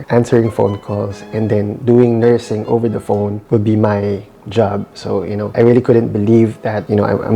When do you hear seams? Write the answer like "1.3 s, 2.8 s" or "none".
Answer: 5.5 s

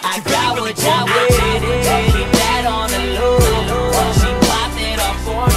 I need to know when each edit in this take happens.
3.0 s

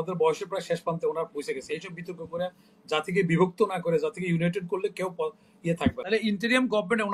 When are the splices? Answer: 6.0 s

